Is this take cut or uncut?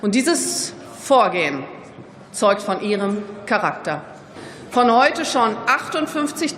cut